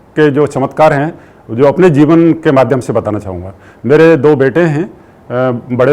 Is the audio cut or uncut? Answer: uncut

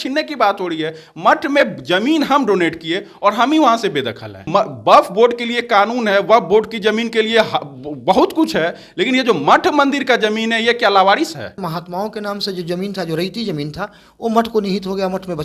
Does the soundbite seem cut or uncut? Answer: cut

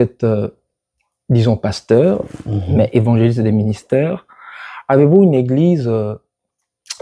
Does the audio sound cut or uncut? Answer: uncut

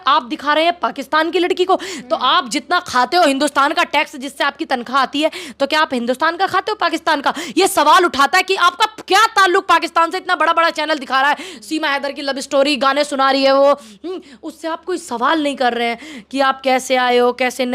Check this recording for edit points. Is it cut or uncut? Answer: uncut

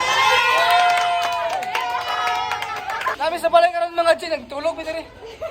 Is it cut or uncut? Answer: cut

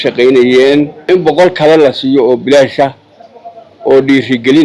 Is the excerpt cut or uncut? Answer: cut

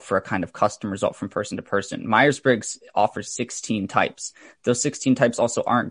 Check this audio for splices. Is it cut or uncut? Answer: uncut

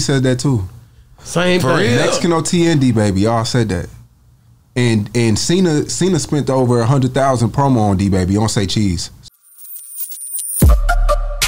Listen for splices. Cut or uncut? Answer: cut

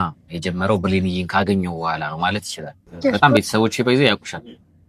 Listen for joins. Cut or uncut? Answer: cut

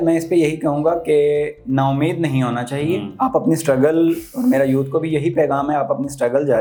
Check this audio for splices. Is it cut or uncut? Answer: uncut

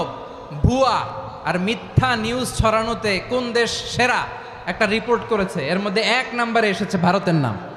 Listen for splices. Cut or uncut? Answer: uncut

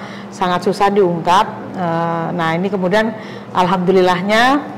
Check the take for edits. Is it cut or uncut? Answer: uncut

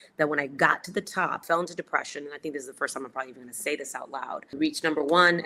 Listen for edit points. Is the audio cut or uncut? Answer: cut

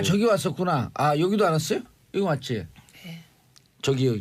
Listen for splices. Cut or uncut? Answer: uncut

